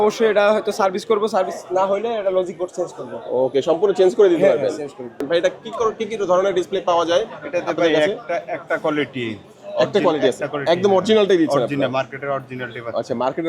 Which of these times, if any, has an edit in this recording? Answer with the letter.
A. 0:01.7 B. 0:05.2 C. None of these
B